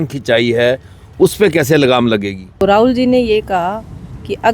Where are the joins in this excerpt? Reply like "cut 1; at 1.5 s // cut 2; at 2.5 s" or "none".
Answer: cut 1; at 2.5 s